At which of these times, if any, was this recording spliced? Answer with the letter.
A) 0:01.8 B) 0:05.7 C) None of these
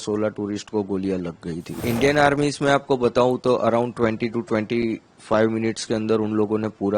A